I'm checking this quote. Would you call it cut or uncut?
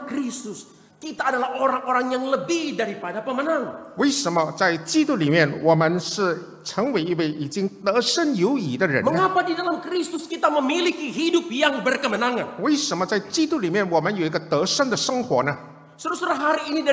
uncut